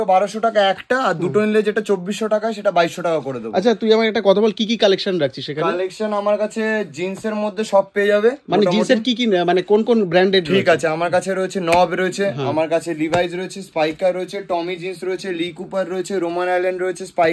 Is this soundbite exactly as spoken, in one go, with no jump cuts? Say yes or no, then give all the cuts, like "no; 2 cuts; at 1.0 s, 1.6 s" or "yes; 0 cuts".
yes; 0 cuts